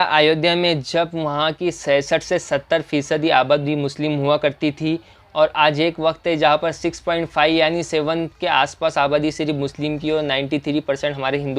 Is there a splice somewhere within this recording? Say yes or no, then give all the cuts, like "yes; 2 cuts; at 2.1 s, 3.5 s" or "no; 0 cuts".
no; 0 cuts